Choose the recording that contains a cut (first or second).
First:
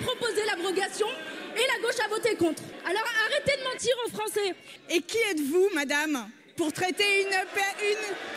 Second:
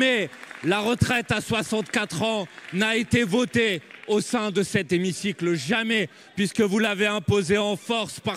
first